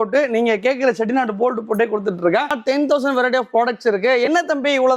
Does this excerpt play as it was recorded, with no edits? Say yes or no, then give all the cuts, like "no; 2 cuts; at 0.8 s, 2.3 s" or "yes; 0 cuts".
no; 1 cut; at 2.5 s